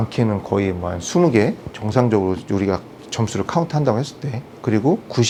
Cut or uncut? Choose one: uncut